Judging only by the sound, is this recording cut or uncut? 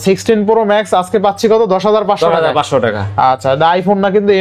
uncut